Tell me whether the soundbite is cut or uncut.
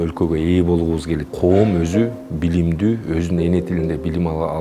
cut